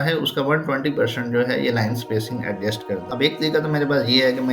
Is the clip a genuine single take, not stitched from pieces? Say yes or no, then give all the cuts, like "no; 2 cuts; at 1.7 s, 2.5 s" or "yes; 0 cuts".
no; 1 cut; at 3.1 s